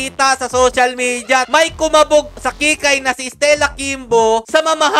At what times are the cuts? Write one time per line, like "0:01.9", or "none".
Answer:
0:01.5